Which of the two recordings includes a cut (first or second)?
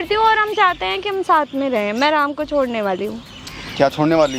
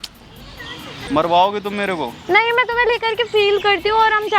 second